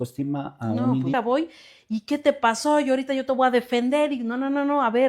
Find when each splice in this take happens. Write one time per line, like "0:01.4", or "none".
0:01.1